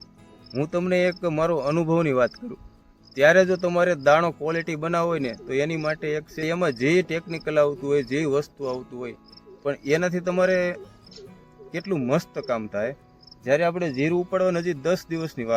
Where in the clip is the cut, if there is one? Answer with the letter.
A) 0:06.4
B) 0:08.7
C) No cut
A